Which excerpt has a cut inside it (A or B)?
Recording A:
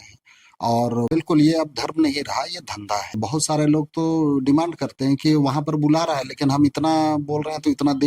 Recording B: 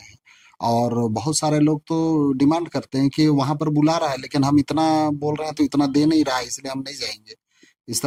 A